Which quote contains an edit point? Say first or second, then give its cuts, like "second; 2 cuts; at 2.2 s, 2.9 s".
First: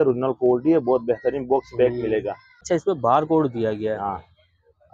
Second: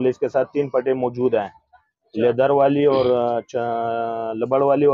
first; 1 cut; at 2.6 s